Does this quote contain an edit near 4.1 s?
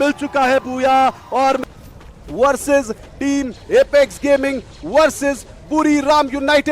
no; 1 cut; at 1.6 s

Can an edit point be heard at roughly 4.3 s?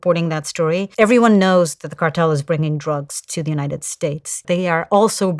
yes; 2 cuts; at 0.9 s, 4.3 s

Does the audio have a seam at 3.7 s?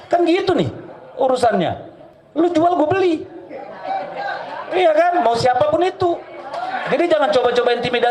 no; 0 cuts

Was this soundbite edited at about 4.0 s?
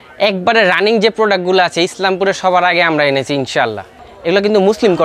yes; 1 cut; at 4.0 s

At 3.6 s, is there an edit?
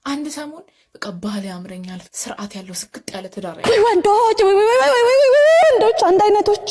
yes; 1 cut; at 3.6 s

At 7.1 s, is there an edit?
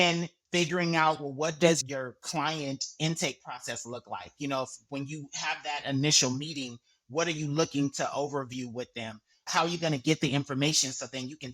no; 1 cut; at 9.5 s

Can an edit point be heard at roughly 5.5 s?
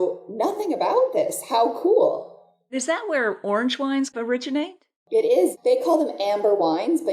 yes; 3 cuts; at 2.7 s, 4.1 s, 5.5 s

